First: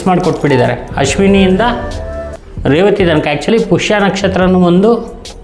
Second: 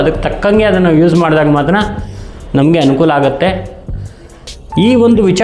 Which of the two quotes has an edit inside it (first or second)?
first